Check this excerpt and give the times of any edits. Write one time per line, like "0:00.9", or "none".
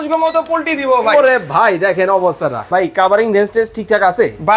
0:02.7